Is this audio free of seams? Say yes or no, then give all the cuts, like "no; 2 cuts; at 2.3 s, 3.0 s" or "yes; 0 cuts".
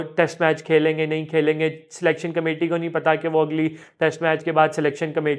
yes; 0 cuts